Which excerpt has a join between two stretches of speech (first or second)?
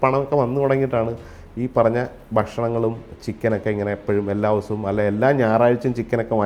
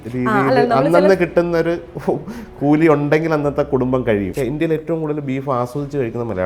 second